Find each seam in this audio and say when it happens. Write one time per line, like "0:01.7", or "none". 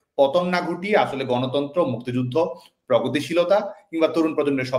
none